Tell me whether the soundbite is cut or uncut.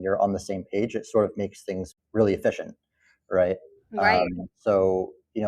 cut